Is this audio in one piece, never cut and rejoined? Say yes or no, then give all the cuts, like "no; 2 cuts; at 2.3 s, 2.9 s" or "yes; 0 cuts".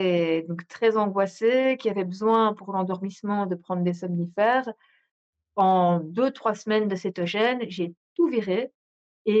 yes; 0 cuts